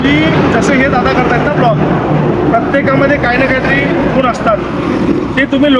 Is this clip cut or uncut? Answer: uncut